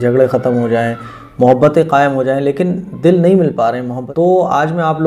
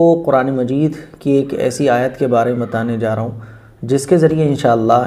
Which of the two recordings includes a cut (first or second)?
first